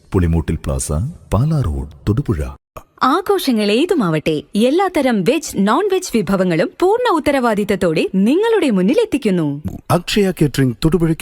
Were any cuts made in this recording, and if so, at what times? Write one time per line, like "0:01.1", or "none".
0:02.8
0:09.6